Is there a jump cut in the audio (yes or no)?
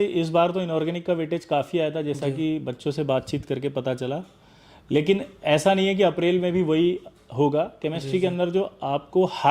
no